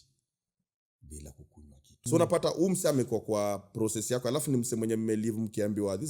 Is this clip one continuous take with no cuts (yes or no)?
no